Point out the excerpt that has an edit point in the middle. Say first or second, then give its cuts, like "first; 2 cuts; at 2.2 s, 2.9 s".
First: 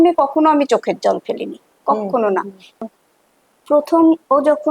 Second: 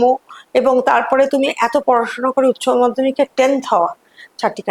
first; 1 cut; at 2.8 s